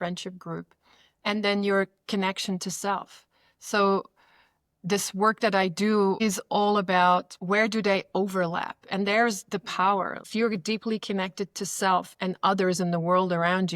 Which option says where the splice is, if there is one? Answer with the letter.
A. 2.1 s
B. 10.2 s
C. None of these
B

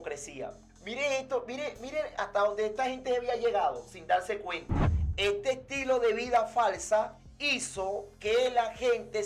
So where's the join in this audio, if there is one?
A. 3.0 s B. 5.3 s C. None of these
C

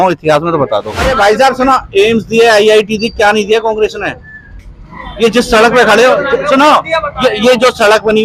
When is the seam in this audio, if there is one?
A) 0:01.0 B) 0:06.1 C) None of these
A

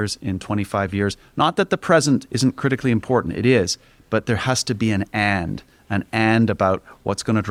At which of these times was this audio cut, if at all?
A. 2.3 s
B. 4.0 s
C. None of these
C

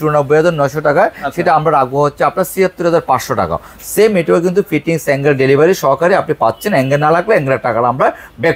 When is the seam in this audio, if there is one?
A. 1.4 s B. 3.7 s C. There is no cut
C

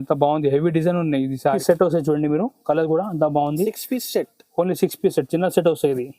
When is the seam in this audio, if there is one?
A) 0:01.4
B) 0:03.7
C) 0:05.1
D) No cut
A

